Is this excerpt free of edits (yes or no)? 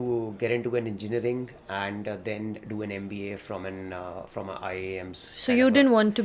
yes